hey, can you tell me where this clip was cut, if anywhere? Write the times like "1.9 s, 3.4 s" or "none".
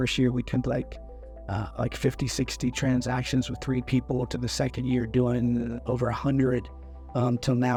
none